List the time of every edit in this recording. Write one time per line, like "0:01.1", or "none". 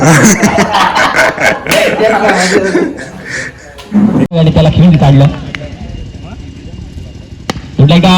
0:04.3